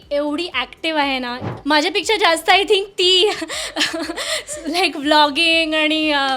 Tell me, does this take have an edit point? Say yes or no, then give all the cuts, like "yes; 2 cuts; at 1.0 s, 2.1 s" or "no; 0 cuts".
yes; 1 cut; at 1.5 s